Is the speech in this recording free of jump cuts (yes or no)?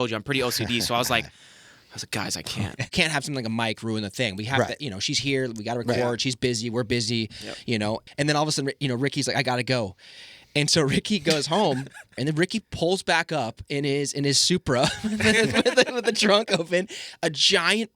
no